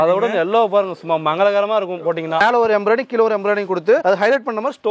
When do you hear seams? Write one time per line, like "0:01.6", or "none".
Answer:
0:02.4